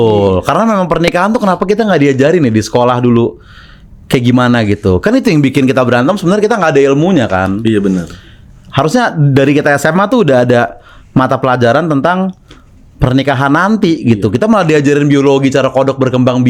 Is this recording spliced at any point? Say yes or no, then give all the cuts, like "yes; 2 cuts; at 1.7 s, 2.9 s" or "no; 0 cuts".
no; 0 cuts